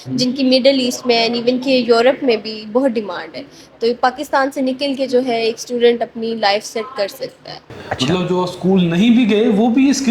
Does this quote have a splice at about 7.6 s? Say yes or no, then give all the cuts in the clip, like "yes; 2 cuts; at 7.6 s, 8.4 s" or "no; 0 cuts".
yes; 1 cut; at 7.6 s